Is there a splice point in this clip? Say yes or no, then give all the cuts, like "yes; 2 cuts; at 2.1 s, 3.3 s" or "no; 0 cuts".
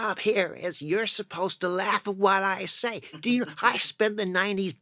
no; 0 cuts